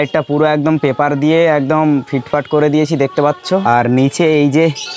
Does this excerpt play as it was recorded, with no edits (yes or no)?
no